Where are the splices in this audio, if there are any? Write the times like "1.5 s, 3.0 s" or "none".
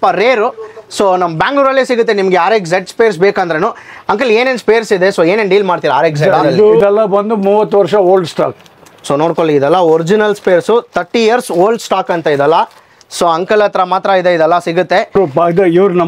6.8 s, 15.2 s